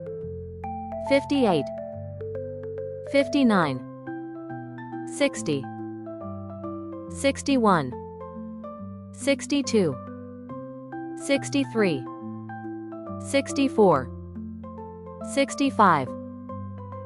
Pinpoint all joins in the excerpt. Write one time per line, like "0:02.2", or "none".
0:01.7
0:03.0
0:03.8
0:05.1